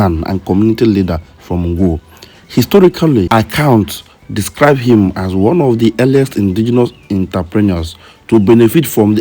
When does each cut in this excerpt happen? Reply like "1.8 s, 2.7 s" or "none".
3.3 s